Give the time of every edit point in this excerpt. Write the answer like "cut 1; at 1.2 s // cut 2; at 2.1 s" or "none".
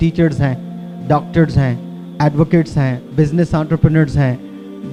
none